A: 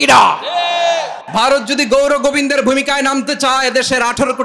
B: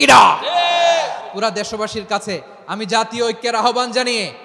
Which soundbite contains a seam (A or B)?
A